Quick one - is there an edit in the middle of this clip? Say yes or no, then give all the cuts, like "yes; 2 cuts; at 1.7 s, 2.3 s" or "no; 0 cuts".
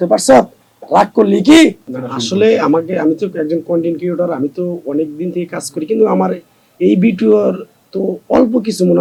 no; 0 cuts